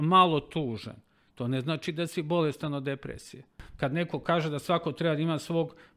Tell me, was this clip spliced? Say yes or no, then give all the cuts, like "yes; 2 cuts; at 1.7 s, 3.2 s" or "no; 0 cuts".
yes; 1 cut; at 3.6 s